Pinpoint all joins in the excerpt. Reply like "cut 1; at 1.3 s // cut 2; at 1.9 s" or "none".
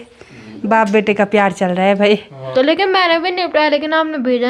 cut 1; at 2.4 s